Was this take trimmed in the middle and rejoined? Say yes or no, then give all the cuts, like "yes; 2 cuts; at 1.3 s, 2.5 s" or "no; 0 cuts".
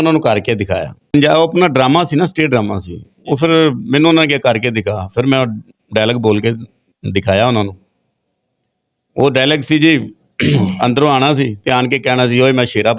yes; 1 cut; at 1.0 s